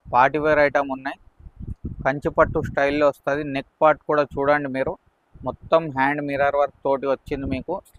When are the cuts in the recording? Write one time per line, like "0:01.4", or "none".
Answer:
none